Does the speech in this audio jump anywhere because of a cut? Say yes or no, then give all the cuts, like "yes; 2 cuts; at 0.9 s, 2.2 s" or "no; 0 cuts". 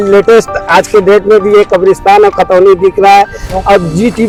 no; 0 cuts